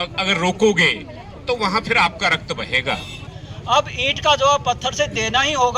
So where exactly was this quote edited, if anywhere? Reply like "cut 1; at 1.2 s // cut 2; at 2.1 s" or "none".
cut 1; at 3.5 s